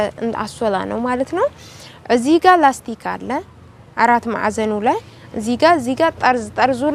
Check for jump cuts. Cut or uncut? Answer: uncut